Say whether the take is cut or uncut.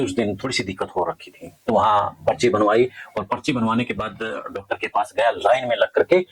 uncut